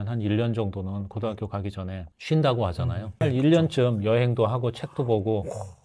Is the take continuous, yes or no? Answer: no